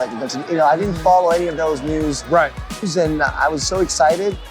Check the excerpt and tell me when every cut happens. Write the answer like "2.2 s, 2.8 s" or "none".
2.9 s